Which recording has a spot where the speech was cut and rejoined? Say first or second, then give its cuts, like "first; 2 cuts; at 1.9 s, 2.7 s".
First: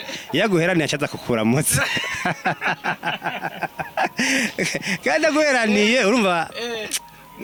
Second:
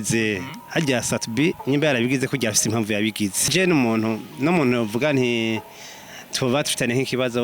second; 1 cut; at 3.5 s